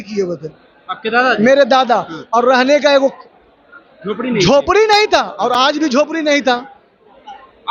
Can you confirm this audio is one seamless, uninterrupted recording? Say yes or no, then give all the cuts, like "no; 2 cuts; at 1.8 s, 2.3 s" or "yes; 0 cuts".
yes; 0 cuts